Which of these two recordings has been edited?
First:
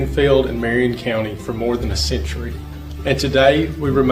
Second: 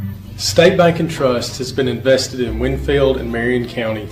first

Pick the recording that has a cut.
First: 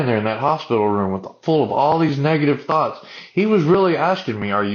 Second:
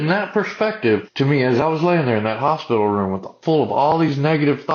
second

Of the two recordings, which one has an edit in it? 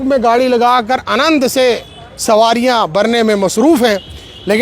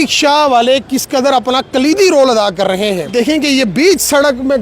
second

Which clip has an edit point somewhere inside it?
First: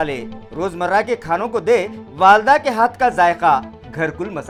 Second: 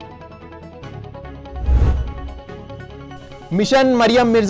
second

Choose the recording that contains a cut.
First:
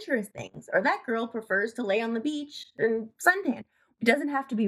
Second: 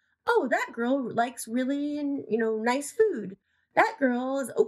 first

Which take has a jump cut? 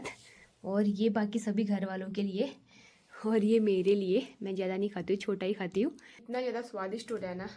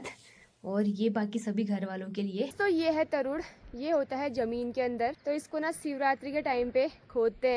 second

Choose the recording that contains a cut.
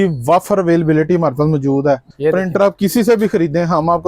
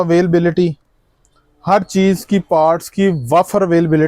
first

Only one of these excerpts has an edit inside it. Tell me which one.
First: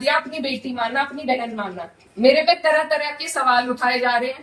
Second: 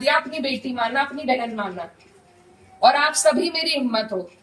first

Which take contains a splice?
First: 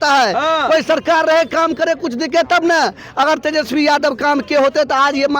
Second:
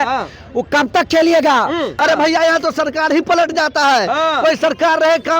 second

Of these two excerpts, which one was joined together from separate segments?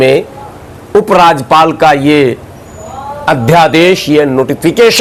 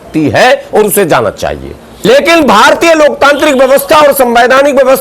second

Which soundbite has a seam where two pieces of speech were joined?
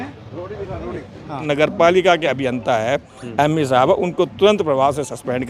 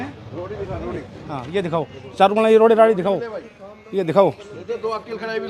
first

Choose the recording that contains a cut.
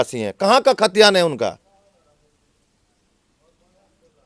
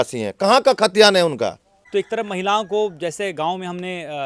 second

